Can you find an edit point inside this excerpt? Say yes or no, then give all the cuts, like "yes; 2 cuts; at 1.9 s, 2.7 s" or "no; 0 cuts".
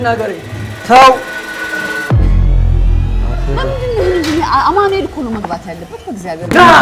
no; 0 cuts